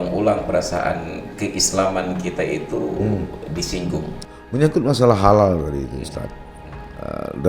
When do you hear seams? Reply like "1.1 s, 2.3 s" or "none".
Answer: 4.2 s